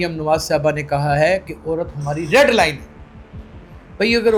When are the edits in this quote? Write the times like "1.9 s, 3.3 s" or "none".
none